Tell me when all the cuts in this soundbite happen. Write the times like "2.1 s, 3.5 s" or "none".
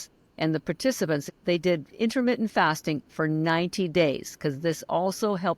1.3 s